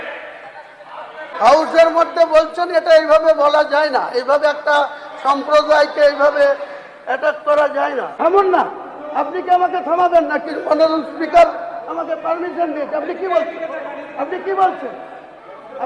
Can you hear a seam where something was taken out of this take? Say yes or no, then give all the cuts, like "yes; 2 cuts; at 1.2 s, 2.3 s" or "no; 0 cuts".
yes; 2 cuts; at 1.2 s, 8.1 s